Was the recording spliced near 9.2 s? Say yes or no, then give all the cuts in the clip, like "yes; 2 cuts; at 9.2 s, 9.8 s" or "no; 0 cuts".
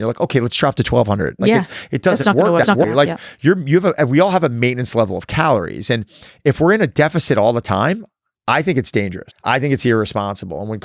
yes; 1 cut; at 9.2 s